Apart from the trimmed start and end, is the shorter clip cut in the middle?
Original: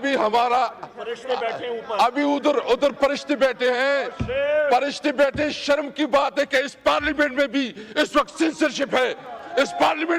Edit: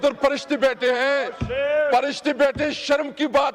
no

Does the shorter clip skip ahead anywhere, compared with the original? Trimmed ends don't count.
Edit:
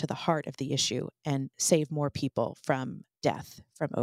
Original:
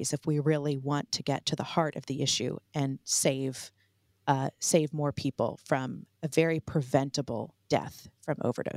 yes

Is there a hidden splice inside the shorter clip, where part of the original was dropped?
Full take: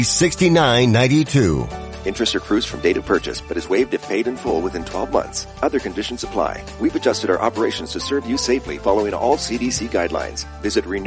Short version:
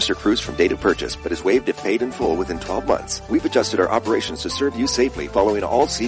yes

